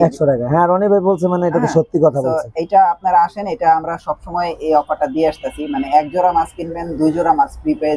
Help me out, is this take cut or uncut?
uncut